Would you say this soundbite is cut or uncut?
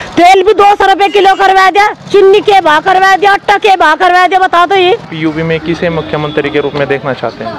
cut